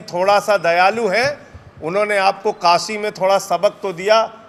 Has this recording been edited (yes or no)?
no